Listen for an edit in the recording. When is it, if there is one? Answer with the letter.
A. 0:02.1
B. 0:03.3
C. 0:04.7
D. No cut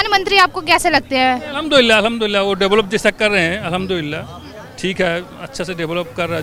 D